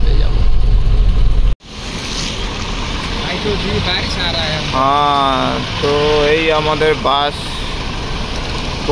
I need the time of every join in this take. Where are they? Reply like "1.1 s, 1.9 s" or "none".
none